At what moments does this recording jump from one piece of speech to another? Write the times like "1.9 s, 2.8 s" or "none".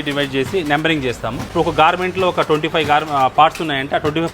1.5 s